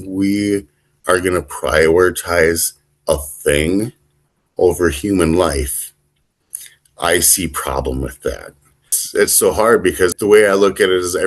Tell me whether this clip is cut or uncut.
cut